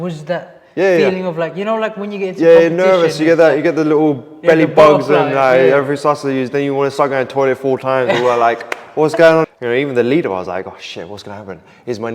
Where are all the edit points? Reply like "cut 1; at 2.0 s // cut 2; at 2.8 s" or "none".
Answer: cut 1; at 9.4 s